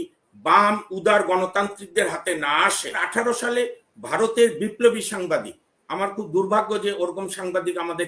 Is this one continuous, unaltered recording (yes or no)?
no